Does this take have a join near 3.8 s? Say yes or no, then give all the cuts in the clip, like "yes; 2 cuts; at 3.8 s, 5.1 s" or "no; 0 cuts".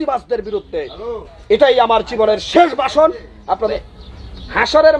yes; 1 cut; at 3.8 s